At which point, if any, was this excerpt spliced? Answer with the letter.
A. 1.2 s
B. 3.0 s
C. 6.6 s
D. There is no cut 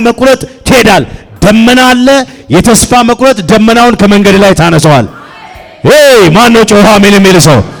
D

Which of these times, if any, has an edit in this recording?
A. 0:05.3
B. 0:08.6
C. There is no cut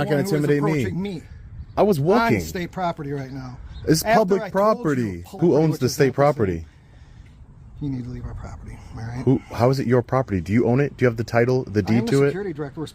A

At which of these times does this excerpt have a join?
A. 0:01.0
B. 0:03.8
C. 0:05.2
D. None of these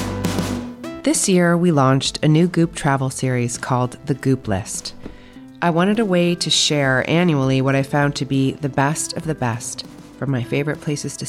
A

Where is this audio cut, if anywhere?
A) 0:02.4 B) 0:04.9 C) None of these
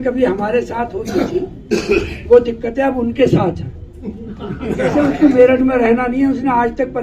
B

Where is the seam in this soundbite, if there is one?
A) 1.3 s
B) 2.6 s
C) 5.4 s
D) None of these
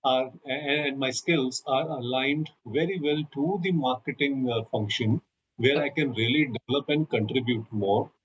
D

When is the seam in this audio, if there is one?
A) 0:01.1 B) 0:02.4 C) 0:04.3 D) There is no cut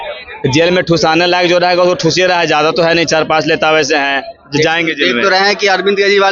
D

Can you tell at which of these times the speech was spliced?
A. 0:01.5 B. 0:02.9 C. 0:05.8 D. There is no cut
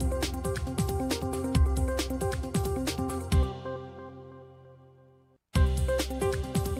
D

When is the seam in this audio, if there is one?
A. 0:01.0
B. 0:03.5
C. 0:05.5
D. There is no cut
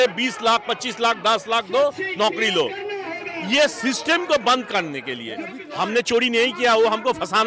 C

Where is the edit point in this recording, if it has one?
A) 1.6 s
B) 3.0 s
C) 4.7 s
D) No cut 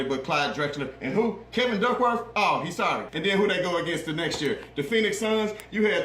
B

